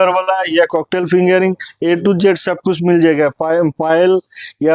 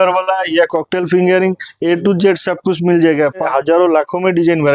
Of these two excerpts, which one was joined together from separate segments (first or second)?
second